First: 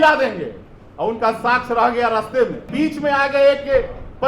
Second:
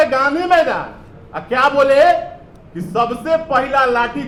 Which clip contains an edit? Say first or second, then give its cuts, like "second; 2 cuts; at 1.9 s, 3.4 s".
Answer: first; 1 cut; at 2.7 s